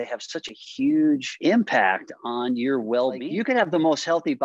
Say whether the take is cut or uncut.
cut